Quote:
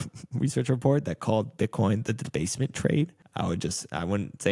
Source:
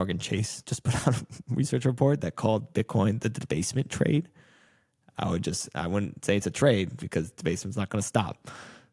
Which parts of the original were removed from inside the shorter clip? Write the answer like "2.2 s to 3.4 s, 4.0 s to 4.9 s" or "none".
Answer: 4.4 s to 5.0 s